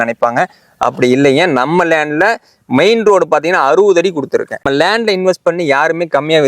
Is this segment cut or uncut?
cut